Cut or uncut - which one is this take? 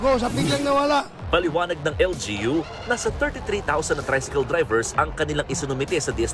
cut